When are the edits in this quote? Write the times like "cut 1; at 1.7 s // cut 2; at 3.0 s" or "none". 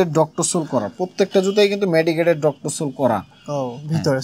none